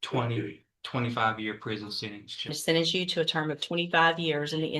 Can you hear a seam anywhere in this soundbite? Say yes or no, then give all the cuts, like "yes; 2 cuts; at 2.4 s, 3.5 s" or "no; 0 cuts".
yes; 1 cut; at 2.6 s